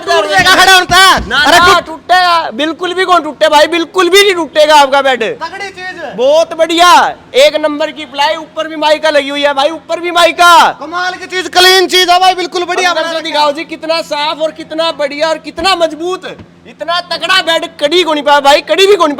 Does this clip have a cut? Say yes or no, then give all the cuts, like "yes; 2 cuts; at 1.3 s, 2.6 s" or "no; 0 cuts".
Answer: no; 0 cuts